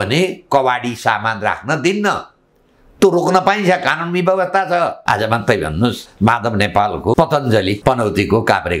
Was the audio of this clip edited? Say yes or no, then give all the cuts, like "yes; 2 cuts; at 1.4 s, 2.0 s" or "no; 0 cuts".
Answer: yes; 4 cuts; at 5.0 s, 6.1 s, 7.1 s, 7.8 s